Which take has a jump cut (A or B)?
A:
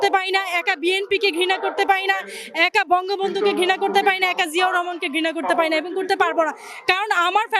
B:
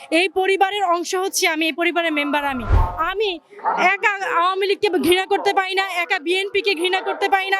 B